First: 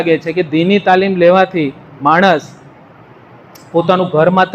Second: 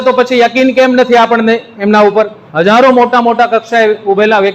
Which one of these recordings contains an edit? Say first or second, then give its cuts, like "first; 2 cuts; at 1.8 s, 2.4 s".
second; 1 cut; at 2.4 s